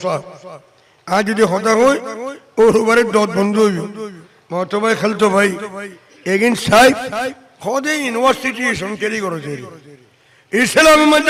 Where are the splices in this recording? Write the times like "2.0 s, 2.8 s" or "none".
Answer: none